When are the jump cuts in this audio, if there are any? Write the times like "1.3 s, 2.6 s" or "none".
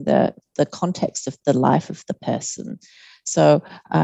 none